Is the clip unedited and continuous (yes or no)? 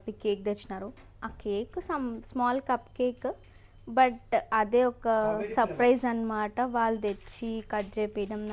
yes